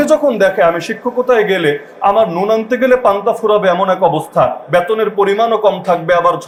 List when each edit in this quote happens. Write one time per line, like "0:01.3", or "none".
none